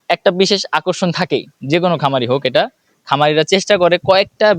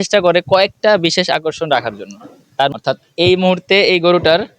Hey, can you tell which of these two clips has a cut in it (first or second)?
second